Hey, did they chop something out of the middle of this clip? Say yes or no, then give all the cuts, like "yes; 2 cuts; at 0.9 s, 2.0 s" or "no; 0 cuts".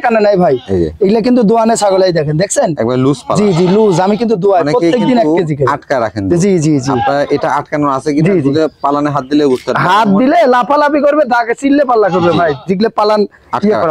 no; 0 cuts